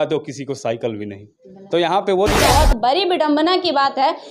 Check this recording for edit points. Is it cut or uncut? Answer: cut